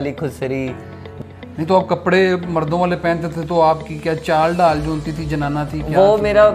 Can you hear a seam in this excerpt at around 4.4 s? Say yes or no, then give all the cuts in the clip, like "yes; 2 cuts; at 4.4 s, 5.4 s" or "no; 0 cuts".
no; 1 cut; at 1.0 s